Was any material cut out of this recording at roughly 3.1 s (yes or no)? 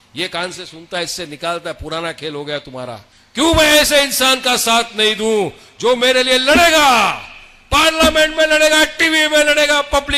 yes